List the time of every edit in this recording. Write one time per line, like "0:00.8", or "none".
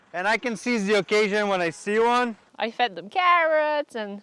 0:02.5